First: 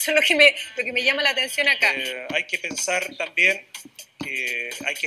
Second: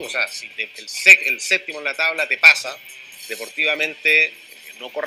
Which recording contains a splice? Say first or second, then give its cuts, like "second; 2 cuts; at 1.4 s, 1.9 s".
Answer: first; 1 cut; at 2.0 s